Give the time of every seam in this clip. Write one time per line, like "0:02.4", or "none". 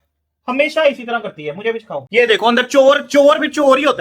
0:02.0